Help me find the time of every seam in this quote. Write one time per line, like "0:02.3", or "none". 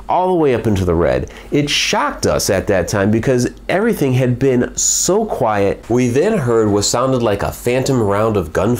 0:05.8

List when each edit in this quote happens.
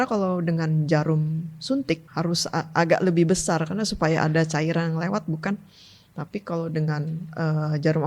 0:02.1

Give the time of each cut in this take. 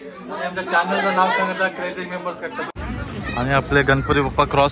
0:02.7

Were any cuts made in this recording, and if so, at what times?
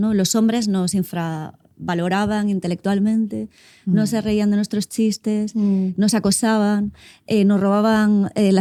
none

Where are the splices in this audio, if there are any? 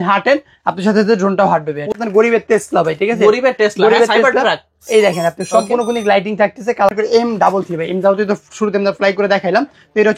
0:02.0
0:06.9

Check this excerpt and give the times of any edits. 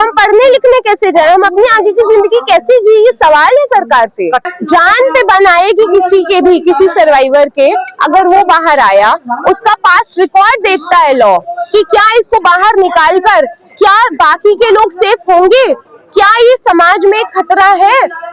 0:04.4

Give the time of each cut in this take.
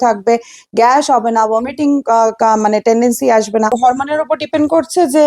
0:03.8

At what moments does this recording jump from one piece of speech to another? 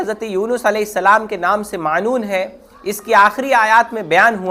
none

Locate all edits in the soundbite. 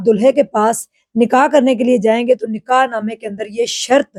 none

